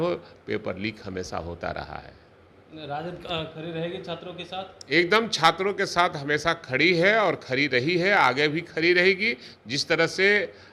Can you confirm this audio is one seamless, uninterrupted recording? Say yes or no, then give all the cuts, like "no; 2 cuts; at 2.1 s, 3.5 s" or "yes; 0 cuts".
yes; 0 cuts